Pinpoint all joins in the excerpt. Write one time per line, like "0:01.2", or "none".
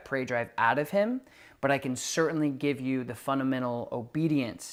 none